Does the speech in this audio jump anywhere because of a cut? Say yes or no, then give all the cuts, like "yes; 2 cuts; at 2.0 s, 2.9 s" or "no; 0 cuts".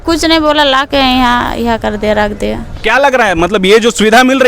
no; 0 cuts